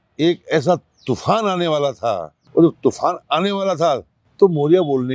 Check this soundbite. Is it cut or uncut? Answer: cut